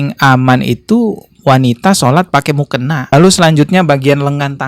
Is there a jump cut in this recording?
yes; 1 cut; at 3.0 s

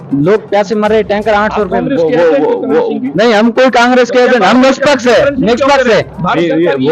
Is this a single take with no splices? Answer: yes; 0 cuts

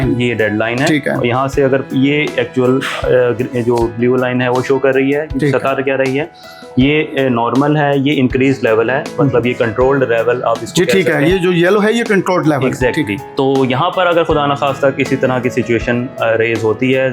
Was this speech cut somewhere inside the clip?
yes; 1 cut; at 13.2 s

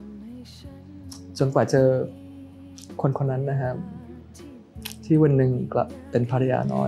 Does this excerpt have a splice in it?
no; 0 cuts

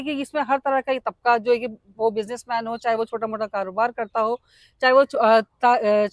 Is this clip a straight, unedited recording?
yes; 0 cuts

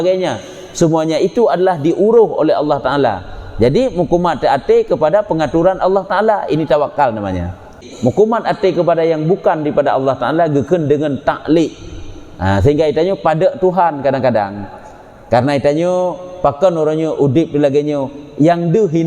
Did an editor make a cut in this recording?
yes; 1 cut; at 7.8 s

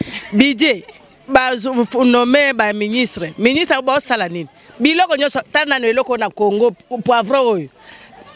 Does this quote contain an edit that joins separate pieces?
no; 0 cuts

